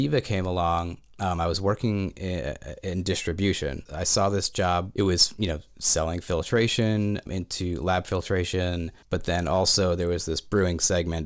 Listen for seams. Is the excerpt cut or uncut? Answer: cut